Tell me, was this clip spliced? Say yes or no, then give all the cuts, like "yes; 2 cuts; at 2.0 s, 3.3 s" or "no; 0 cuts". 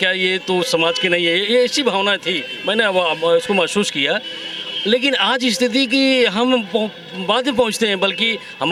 no; 0 cuts